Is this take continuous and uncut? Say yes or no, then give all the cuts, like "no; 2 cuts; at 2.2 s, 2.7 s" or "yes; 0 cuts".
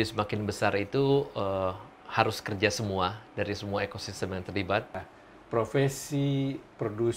no; 1 cut; at 5.0 s